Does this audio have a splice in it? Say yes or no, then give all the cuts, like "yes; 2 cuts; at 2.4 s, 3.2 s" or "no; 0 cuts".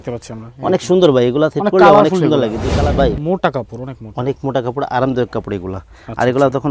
yes; 1 cut; at 2.7 s